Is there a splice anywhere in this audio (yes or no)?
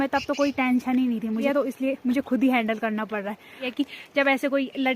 yes